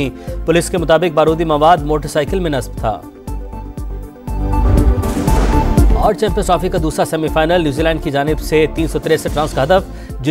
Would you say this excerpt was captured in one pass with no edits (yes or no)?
yes